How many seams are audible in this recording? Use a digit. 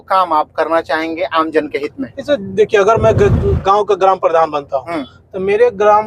0